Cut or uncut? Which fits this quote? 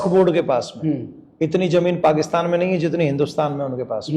uncut